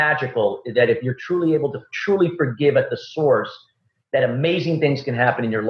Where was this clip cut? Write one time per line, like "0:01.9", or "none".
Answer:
none

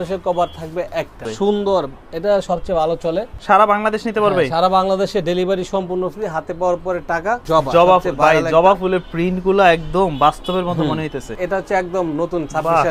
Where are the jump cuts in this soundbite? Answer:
0:01.3
0:03.3
0:07.4
0:11.3

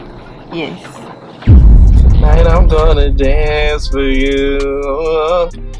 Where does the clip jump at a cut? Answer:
none

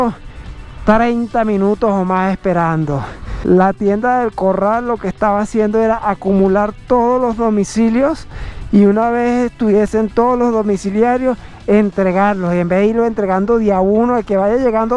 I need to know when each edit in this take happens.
none

